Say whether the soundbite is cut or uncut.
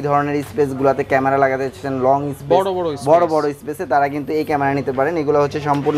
uncut